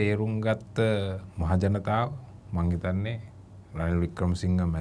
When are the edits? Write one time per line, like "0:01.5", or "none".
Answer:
none